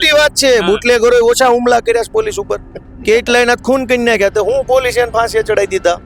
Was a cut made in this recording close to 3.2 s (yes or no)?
no